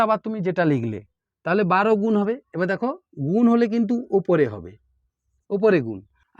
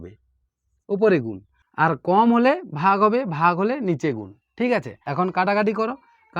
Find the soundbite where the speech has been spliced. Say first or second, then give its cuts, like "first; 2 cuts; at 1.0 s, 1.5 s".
second; 1 cut; at 5.0 s